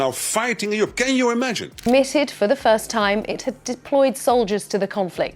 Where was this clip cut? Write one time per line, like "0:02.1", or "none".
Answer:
0:01.7

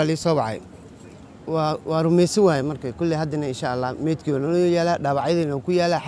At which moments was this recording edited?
none

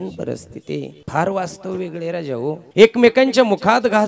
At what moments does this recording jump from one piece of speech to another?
0:01.0
0:02.6

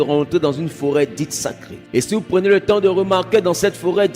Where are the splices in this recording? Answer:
0:01.7

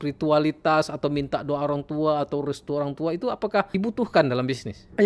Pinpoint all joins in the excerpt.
0:03.7

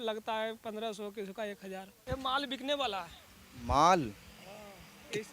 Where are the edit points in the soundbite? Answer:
0:02.0

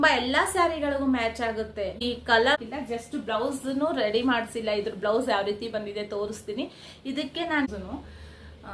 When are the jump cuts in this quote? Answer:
0:02.6
0:07.7

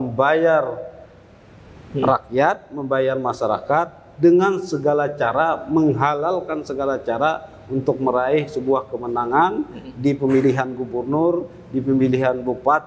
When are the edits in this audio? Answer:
none

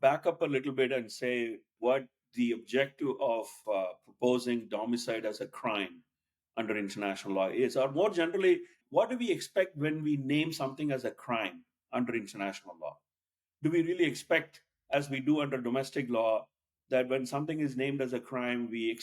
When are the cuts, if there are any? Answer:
0:01.8
0:03.6
0:08.8

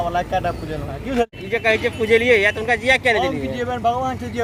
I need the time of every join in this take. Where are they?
none

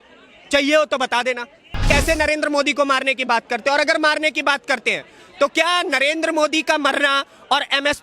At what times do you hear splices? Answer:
0:01.5

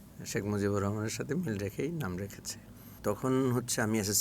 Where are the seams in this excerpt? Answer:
0:03.0

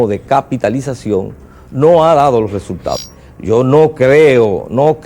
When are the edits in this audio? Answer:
0:02.9

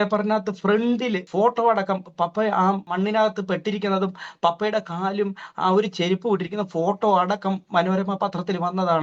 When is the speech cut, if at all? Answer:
0:01.3
0:02.9

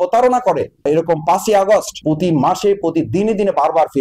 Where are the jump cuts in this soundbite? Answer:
none

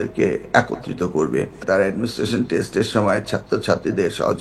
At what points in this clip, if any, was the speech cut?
0:01.6

